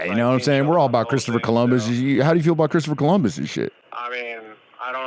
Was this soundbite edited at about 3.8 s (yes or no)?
yes